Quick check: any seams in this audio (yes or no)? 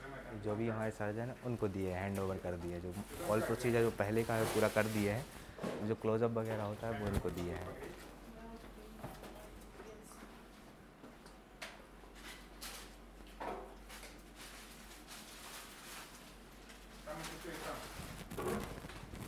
no